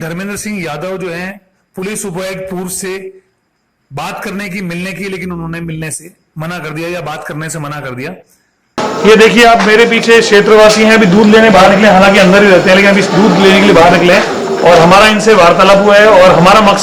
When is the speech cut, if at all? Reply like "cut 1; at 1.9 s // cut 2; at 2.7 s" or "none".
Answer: cut 1; at 8.9 s